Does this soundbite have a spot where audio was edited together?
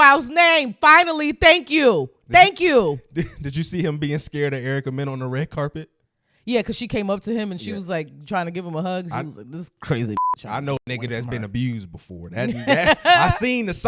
no; 0 cuts

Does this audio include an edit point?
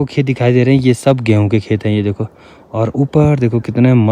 no; 0 cuts

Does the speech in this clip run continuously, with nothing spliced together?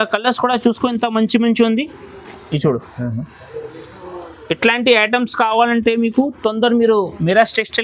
yes; 0 cuts

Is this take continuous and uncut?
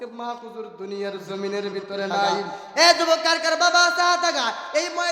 no; 1 cut; at 2.5 s

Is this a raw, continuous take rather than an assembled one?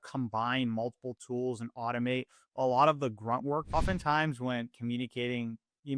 no; 1 cut; at 3.7 s

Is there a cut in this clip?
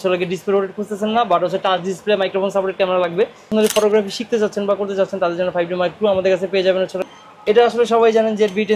yes; 2 cuts; at 3.5 s, 7.0 s

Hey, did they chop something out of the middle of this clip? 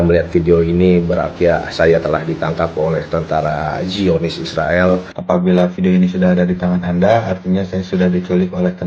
yes; 1 cut; at 5.1 s

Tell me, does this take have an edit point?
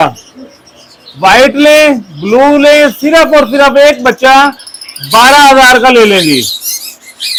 no; 0 cuts

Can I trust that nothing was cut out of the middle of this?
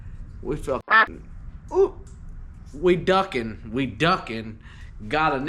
yes; 0 cuts

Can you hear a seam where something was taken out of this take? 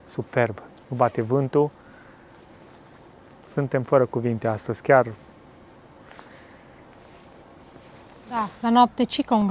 yes; 1 cut; at 8.4 s

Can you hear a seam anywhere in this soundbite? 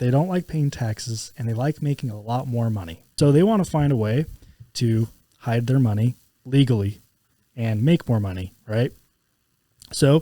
yes; 1 cut; at 3.1 s

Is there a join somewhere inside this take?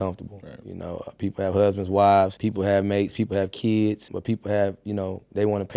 yes; 2 cuts; at 2.4 s, 4.1 s

